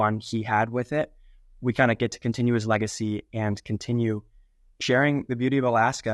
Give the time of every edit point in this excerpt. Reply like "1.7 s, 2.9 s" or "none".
4.7 s